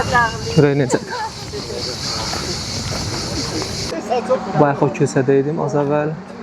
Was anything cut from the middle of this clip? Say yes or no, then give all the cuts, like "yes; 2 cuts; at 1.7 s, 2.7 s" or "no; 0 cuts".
yes; 1 cut; at 3.9 s